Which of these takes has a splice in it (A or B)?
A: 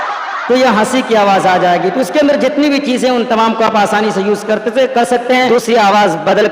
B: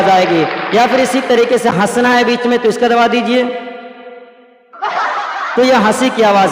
A